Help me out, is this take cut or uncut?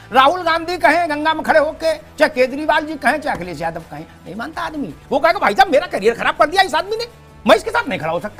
uncut